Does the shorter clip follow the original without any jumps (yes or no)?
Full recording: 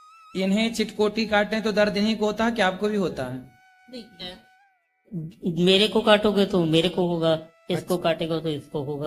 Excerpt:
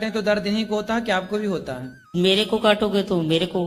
no